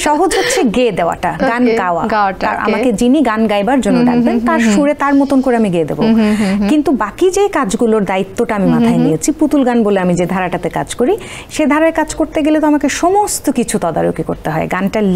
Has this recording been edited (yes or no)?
no